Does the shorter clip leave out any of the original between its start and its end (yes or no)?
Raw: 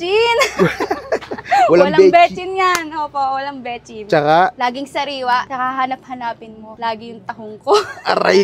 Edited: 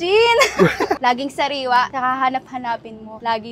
yes